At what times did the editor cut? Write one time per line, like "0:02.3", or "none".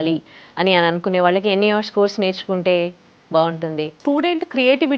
0:03.9